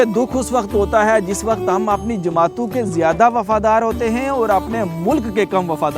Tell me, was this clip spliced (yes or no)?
no